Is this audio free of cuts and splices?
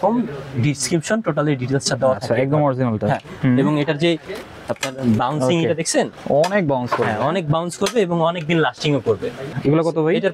no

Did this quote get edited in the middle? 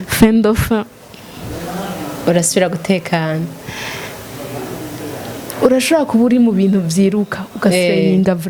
no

